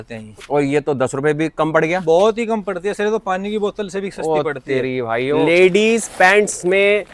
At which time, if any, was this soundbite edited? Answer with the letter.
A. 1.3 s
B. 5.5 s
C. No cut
B